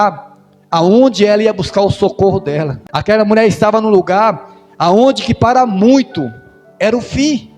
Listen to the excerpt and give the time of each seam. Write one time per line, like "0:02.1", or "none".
0:02.8